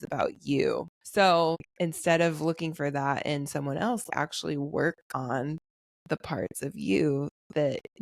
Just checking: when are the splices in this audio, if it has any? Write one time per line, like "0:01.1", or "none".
0:01.0
0:01.7
0:04.1